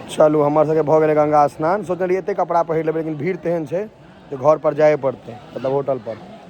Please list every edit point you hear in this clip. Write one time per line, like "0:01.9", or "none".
none